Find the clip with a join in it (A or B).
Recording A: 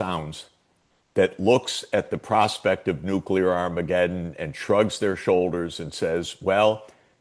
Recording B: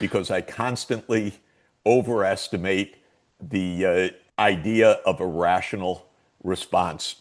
B